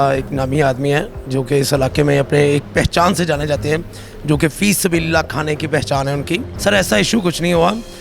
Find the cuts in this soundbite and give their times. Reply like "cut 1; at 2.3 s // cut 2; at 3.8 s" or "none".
cut 1; at 6.5 s